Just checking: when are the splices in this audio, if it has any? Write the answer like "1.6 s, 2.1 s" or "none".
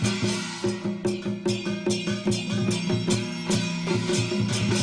2.5 s